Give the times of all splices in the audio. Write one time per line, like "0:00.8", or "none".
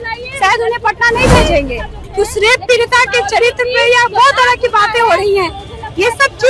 0:02.0

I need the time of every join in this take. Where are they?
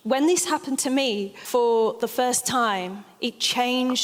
0:01.3

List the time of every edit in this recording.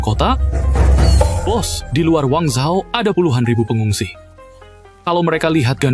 none

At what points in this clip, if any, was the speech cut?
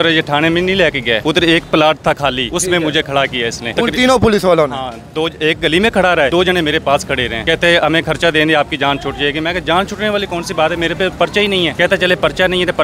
0:01.2
0:02.5
0:03.6
0:06.3
0:07.4
0:11.7

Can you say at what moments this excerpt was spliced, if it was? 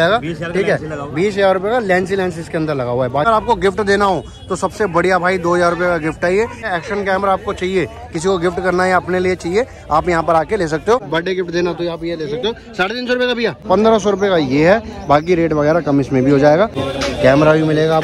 0:03.2
0:06.6
0:11.0
0:13.6
0:16.8

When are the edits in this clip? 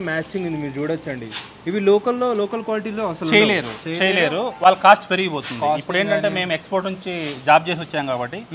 none

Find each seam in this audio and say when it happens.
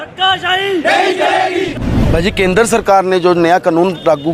0:01.9

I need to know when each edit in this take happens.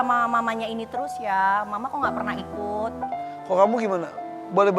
0:03.1

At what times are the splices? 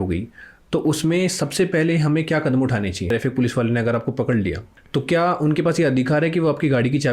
0:03.0
0:04.7

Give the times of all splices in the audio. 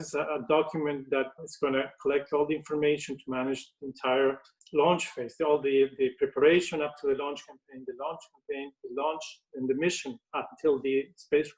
0:01.4
0:04.5

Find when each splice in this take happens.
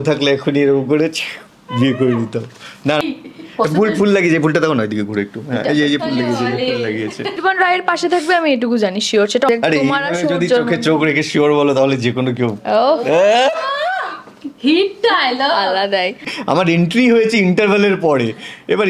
0:03.0
0:07.3
0:09.5
0:16.3

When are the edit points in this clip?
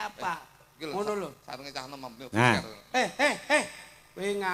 none

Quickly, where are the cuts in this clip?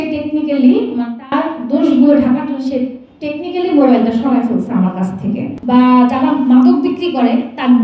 0:05.5

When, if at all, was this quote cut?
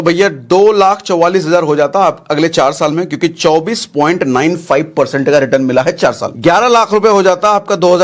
0:06.3

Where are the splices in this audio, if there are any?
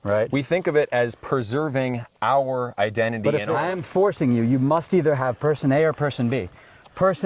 0:03.5

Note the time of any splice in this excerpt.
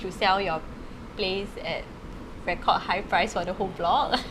none

